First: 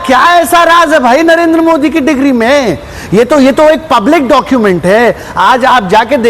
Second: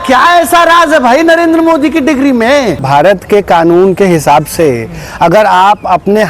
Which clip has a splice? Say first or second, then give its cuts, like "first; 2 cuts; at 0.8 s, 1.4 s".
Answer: second; 1 cut; at 2.8 s